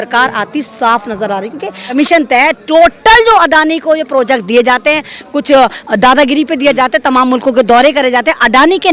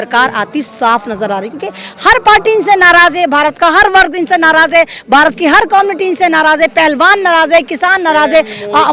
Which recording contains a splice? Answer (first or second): first